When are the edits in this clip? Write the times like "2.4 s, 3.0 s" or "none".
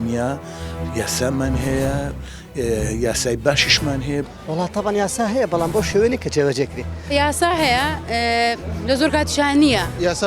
none